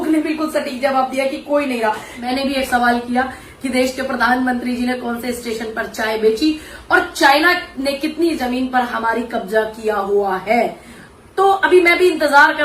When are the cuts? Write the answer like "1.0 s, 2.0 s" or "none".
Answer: 2.1 s